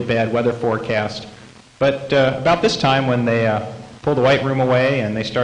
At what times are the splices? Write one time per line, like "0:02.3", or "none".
0:03.3